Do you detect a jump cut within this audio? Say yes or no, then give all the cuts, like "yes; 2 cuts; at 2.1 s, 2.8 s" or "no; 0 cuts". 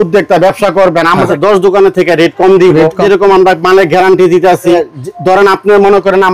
yes; 3 cuts; at 1.3 s, 3.0 s, 4.8 s